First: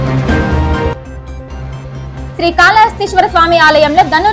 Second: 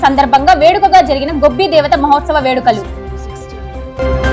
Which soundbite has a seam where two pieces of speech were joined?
first; 1 cut; at 0.9 s

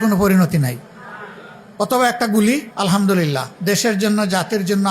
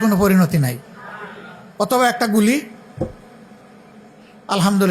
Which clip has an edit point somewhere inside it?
first; 2 cuts; at 2.7 s, 3.5 s

